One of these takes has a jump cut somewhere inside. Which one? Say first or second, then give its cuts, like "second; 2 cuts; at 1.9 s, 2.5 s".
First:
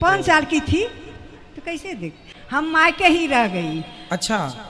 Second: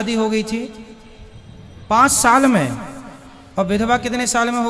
first; 1 cut; at 2.3 s